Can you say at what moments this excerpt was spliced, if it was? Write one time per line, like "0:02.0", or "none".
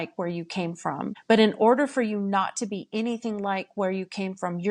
0:01.2